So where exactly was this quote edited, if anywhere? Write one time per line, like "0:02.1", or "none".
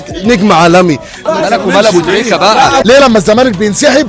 0:01.1
0:02.8